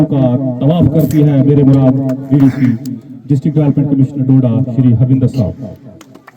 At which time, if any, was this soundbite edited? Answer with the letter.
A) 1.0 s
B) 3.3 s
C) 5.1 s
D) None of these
D